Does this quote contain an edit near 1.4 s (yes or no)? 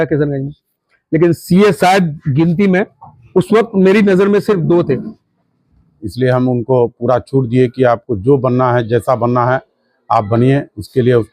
no